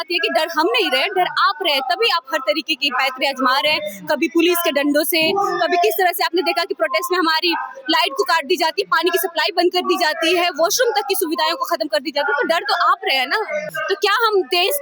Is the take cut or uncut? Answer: cut